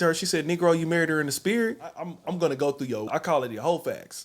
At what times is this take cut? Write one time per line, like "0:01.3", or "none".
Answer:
0:02.1
0:03.1